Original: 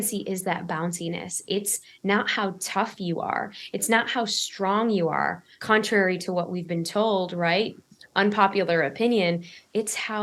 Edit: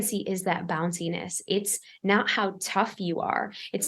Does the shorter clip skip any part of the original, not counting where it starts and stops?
no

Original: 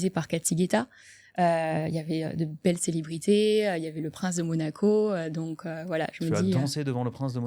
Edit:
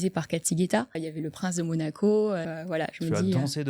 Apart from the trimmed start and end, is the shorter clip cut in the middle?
yes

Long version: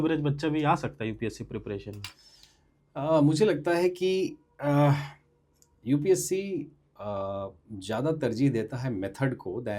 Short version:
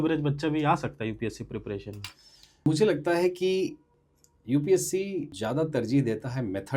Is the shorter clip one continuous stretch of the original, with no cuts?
no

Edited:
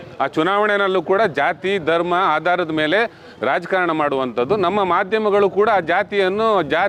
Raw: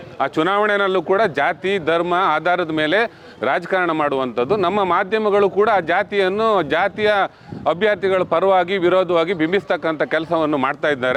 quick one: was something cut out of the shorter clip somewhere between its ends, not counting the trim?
no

